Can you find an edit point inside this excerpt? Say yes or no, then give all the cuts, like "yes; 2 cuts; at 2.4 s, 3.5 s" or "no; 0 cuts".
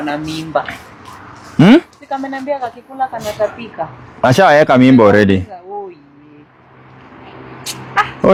no; 0 cuts